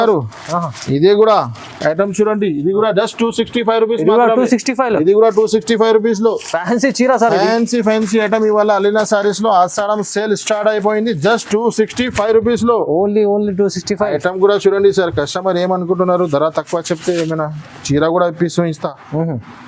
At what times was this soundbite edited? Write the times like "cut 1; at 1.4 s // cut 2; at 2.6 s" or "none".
none